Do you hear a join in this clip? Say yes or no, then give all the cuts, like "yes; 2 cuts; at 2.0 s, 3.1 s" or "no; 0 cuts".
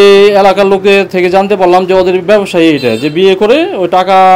no; 0 cuts